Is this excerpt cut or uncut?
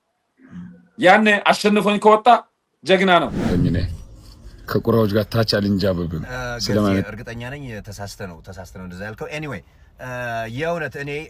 cut